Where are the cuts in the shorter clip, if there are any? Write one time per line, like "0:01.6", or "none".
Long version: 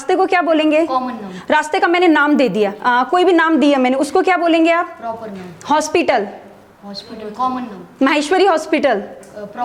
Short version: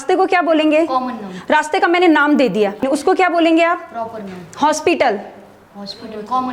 0:02.8